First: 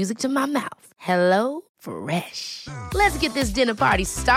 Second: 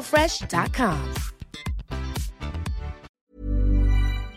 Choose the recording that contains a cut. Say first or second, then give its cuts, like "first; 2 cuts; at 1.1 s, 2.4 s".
second; 1 cut; at 3.0 s